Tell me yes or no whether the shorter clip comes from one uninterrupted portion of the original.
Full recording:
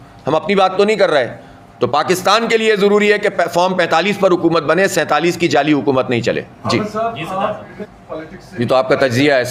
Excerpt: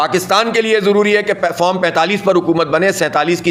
yes